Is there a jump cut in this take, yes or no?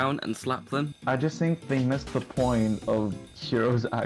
yes